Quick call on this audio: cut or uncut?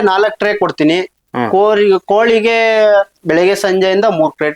uncut